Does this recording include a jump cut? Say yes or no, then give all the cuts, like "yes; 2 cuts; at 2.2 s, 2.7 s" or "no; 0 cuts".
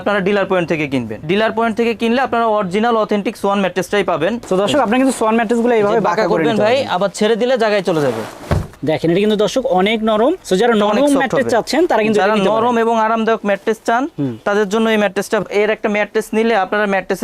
yes; 4 cuts; at 1.1 s, 4.4 s, 8.7 s, 15.4 s